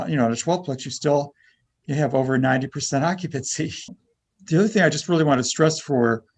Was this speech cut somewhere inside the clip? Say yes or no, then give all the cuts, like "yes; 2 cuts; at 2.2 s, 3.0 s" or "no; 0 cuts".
yes; 1 cut; at 4.0 s